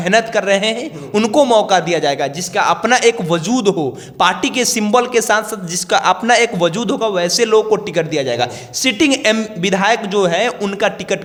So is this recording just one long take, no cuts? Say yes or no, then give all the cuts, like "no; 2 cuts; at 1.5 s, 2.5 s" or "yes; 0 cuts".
yes; 0 cuts